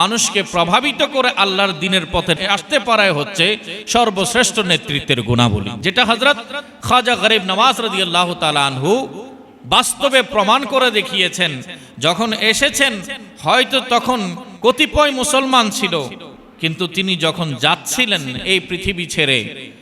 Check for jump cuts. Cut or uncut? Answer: cut